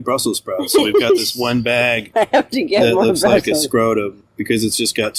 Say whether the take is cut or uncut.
uncut